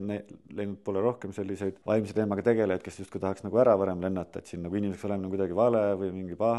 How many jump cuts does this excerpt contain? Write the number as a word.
one